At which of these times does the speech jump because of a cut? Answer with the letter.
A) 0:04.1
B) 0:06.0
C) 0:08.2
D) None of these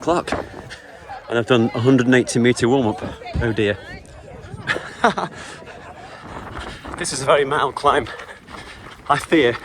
B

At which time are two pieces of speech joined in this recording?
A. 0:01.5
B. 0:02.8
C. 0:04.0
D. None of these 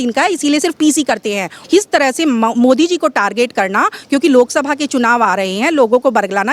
A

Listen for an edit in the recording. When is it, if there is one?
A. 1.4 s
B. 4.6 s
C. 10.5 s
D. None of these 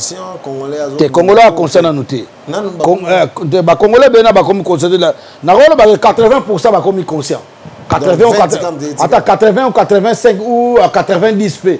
D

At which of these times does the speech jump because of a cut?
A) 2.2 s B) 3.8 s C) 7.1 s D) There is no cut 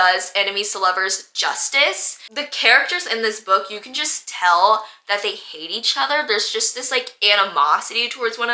D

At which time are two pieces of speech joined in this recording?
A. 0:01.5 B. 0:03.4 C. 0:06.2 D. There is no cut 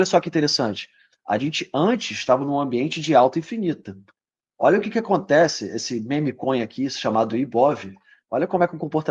D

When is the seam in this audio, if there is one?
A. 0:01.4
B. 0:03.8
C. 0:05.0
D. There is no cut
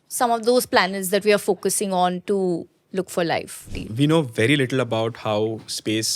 B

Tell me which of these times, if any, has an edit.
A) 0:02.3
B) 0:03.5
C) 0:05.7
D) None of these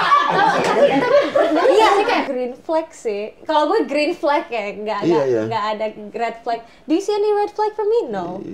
A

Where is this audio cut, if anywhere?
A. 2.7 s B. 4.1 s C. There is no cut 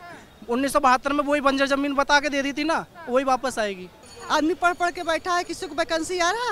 B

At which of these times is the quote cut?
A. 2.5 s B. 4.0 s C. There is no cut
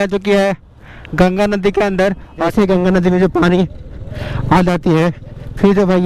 A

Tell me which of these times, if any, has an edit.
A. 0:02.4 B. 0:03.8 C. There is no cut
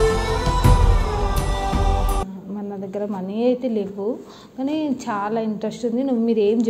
A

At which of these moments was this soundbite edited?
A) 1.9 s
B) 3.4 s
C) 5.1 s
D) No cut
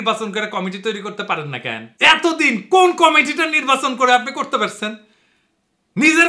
A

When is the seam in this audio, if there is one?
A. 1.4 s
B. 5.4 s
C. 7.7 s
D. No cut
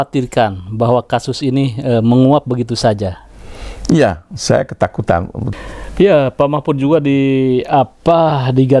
B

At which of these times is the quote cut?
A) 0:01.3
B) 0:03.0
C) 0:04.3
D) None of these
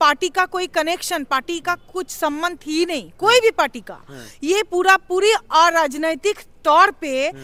D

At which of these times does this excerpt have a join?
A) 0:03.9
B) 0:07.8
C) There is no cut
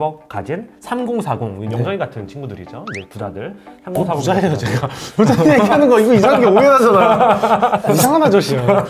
B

